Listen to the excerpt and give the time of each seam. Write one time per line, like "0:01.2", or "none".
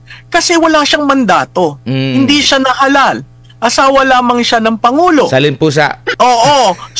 0:06.0